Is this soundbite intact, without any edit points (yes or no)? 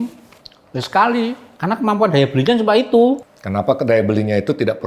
no